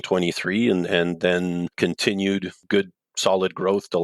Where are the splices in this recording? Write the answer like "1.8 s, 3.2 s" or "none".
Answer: 1.7 s